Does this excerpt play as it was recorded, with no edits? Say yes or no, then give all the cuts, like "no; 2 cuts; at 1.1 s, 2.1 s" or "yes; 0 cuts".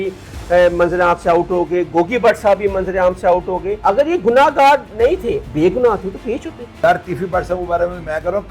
no; 3 cuts; at 3.7 s, 5.5 s, 6.7 s